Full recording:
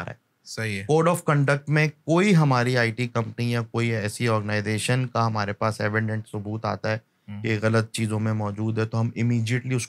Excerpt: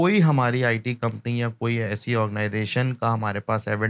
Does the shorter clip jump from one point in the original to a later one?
no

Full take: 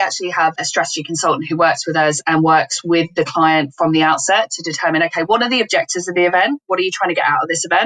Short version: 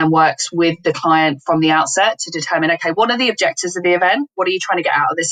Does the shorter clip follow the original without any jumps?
yes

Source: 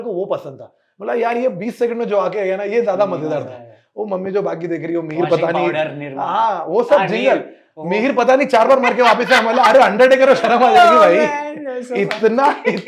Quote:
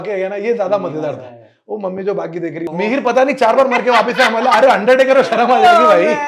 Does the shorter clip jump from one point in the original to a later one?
yes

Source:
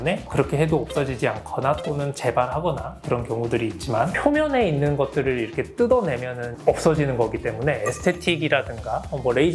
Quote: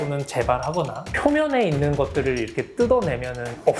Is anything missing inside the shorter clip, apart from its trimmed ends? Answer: yes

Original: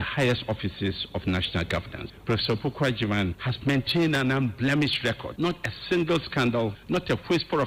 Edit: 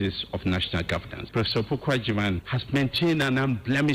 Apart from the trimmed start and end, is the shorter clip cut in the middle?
yes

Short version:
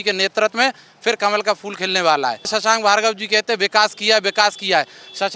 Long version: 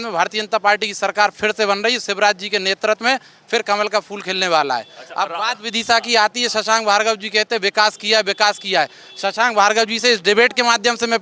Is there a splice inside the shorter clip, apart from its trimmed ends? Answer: yes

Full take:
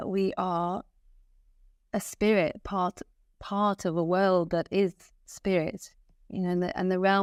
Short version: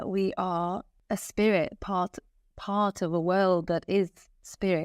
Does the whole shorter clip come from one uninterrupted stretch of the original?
no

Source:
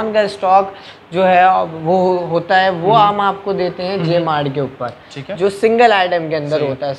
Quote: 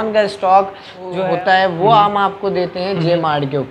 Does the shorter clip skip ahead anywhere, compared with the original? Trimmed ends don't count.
yes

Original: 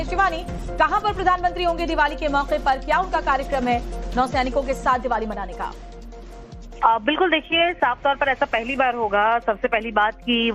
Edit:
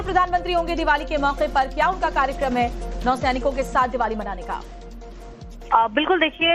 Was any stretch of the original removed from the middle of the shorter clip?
no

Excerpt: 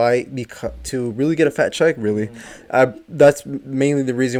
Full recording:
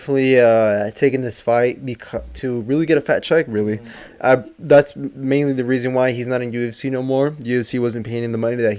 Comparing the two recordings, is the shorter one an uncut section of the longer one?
yes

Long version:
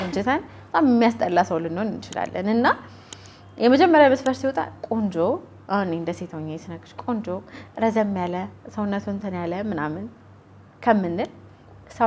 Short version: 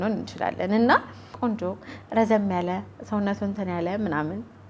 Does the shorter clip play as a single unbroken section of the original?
no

